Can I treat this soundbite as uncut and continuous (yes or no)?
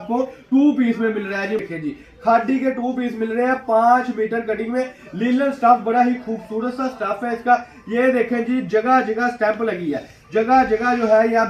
no